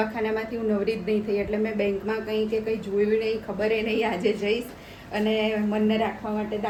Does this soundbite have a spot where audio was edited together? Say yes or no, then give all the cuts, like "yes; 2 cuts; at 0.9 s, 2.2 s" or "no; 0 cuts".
no; 0 cuts